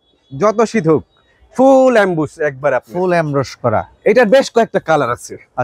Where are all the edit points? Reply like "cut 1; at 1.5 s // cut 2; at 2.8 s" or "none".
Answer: none